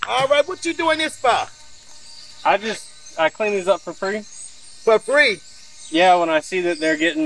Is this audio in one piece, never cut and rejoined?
yes; 0 cuts

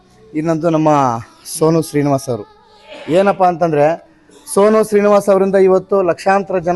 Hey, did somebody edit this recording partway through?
no; 0 cuts

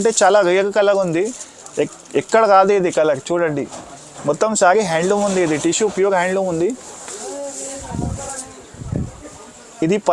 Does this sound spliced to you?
no; 0 cuts

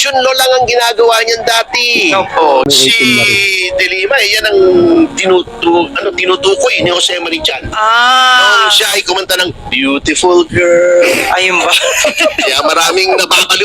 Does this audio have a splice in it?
yes; 1 cut; at 2.6 s

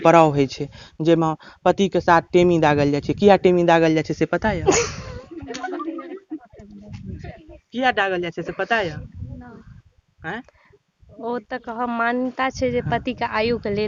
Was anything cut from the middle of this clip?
no; 0 cuts

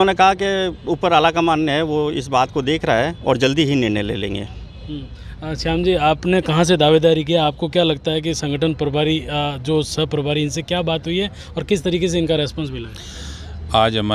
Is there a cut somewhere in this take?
no; 0 cuts

